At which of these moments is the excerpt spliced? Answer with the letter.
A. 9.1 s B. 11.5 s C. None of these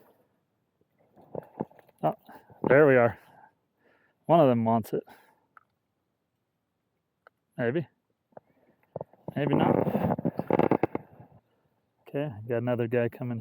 B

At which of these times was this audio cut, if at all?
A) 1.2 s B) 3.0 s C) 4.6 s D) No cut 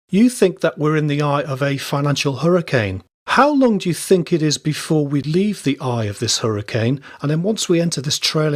C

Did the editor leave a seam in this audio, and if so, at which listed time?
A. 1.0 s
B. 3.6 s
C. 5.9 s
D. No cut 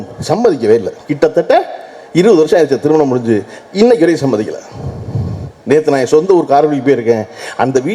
D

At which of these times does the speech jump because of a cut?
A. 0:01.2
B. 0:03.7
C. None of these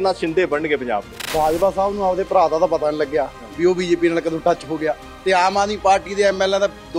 A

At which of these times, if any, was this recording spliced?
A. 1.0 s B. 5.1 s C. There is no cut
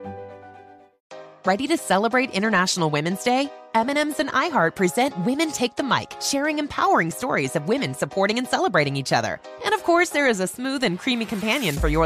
A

